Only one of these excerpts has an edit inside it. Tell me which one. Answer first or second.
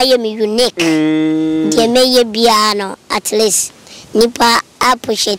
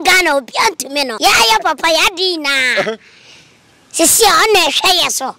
second